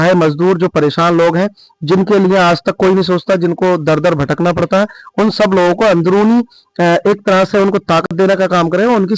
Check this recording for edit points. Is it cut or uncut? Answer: uncut